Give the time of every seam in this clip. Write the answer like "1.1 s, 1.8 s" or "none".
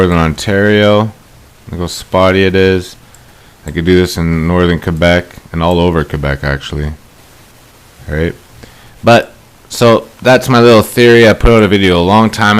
9.6 s